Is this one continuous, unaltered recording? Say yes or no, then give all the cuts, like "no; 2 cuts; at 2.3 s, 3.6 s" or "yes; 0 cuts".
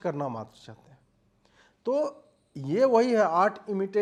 yes; 0 cuts